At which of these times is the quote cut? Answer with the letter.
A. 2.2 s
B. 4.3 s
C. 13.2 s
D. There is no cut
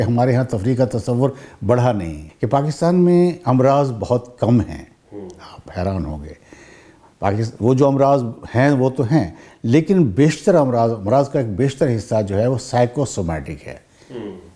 A